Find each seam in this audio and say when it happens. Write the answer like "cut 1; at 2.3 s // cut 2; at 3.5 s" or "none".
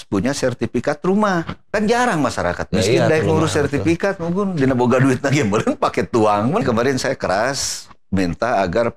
cut 1; at 1.6 s // cut 2; at 6.6 s